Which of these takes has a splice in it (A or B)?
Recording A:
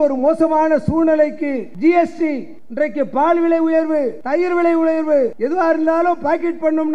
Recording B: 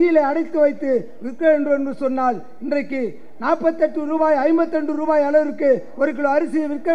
A